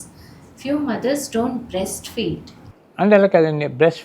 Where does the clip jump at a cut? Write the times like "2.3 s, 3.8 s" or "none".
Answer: none